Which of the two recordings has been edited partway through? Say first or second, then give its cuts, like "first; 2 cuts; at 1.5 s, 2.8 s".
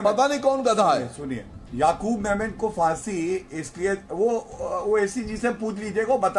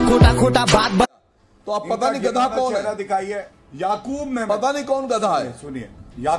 second; 1 cut; at 1.3 s